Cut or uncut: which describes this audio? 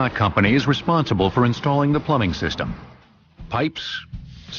cut